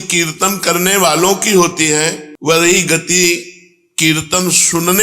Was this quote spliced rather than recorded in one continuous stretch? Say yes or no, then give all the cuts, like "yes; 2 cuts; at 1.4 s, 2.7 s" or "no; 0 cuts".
no; 0 cuts